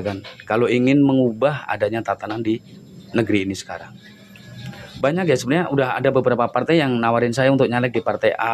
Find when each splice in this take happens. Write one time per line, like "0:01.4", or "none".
none